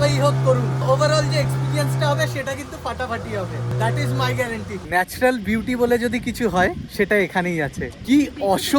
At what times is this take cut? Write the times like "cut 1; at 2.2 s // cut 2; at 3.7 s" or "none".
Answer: cut 1; at 0.8 s // cut 2; at 3.7 s // cut 3; at 4.7 s // cut 4; at 6.8 s // cut 5; at 7.9 s